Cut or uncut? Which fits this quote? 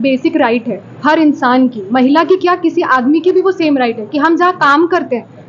uncut